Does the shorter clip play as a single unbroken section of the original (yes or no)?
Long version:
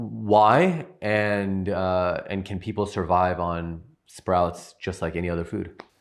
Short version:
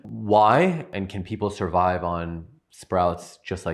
no